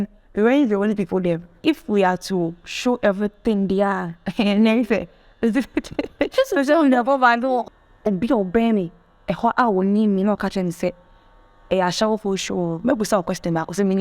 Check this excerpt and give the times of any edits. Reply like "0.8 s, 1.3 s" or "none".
1.6 s, 7.7 s